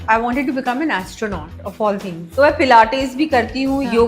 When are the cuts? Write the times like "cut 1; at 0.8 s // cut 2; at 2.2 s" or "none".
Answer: cut 1; at 2.2 s